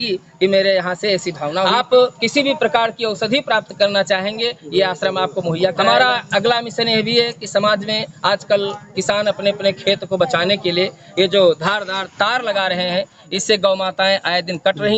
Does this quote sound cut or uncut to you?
cut